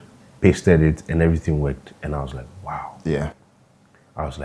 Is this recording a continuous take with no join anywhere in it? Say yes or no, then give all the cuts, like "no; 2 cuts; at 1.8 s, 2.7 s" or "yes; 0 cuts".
yes; 0 cuts